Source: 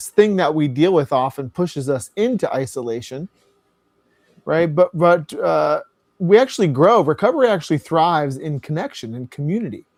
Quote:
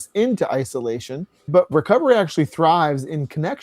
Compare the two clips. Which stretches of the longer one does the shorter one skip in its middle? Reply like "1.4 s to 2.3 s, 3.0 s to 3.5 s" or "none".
3.7 s to 7.0 s